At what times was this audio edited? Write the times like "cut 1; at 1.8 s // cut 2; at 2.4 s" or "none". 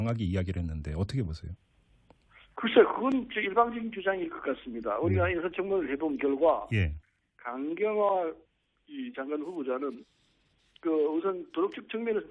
none